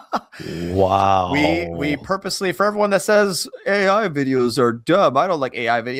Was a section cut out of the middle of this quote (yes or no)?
no